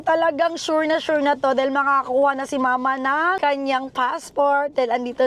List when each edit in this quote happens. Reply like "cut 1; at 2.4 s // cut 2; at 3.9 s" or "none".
cut 1; at 3.4 s